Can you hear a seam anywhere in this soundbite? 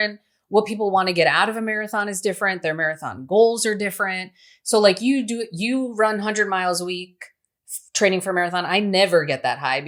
no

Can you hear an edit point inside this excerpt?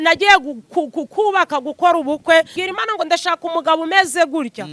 yes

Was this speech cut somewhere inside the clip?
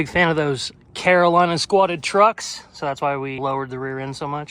yes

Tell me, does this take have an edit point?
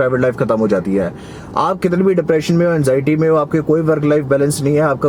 no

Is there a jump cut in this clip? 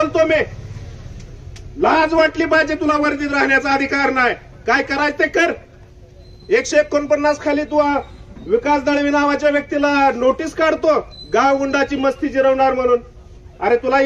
no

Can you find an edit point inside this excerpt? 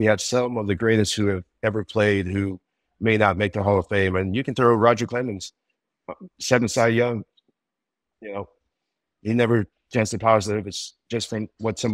no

